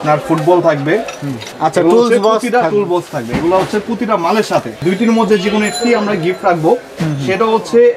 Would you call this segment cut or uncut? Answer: cut